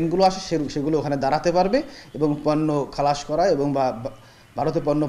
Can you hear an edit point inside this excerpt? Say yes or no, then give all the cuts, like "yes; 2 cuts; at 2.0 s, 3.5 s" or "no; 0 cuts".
no; 0 cuts